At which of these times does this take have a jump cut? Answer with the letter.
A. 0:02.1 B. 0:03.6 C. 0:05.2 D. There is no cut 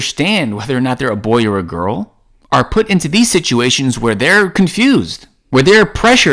D